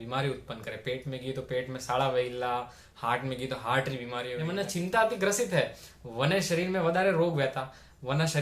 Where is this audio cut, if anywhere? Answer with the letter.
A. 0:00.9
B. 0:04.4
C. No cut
B